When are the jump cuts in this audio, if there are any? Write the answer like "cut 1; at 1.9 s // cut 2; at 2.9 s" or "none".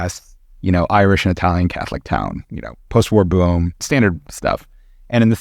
cut 1; at 3.8 s